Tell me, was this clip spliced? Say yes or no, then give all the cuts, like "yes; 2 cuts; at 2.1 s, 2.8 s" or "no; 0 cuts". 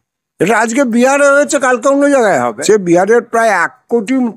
yes; 1 cut; at 2.6 s